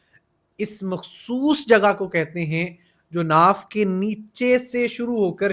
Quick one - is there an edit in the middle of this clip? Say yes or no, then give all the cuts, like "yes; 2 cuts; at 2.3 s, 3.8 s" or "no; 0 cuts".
no; 0 cuts